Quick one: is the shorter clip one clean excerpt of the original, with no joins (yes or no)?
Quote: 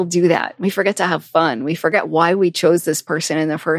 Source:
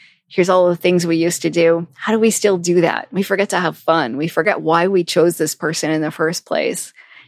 yes